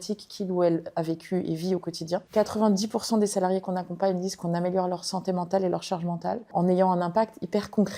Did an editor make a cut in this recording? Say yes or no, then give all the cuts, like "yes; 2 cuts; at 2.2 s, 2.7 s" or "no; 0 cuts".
yes; 2 cuts; at 2.3 s, 6.5 s